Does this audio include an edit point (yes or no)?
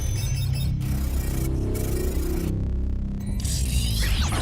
no